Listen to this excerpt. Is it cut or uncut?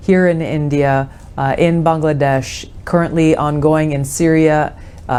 uncut